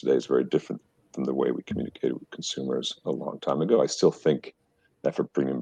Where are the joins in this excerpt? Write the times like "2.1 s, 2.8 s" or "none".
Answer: none